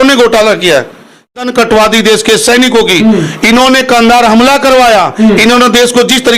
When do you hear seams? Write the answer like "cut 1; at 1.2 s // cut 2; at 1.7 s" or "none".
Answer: cut 1; at 1.4 s